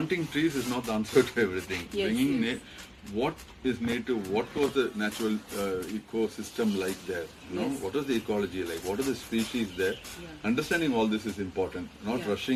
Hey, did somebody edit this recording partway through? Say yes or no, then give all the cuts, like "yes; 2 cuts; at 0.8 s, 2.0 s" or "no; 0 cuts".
no; 0 cuts